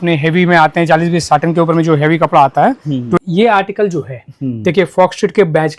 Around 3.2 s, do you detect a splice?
yes; 1 cut; at 3.2 s

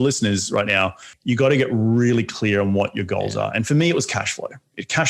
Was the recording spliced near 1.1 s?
yes; 1 cut; at 1.1 s

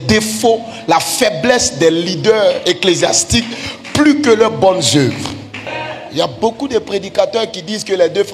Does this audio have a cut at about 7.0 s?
no; 1 cut; at 5.7 s

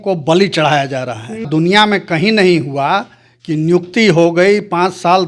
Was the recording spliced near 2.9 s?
no; 1 cut; at 1.5 s

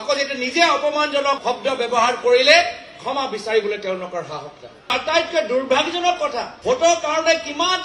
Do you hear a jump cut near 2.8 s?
no; 2 cuts; at 4.9 s, 6.5 s

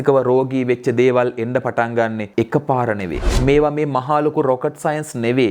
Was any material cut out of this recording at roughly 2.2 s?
yes; 2 cuts; at 2.2 s, 3.2 s

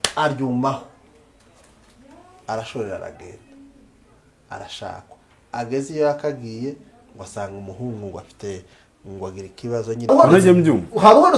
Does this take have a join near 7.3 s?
no; 1 cut; at 10.1 s

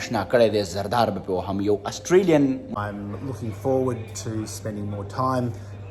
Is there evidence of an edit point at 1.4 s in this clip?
no; 1 cut; at 2.7 s

